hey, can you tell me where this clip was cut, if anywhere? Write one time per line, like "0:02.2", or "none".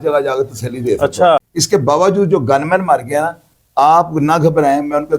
0:01.5